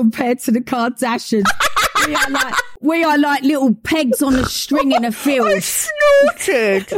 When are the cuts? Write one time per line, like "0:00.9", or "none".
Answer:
0:02.6

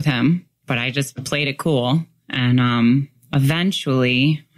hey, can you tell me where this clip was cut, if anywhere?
none

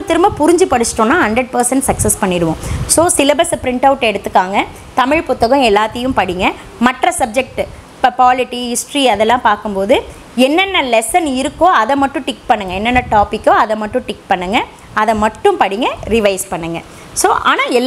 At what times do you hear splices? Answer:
none

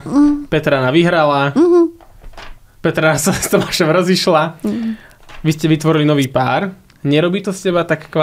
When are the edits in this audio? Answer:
none

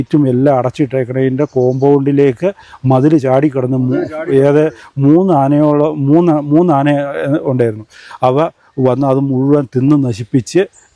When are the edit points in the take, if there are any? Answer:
none

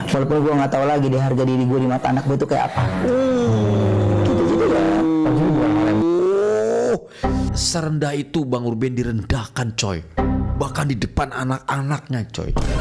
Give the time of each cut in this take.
none

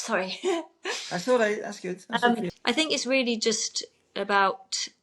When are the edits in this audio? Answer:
0:02.5

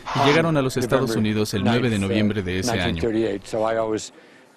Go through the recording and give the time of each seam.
none

